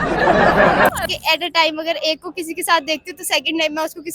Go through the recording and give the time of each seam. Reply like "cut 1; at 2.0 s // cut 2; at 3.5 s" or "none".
cut 1; at 0.9 s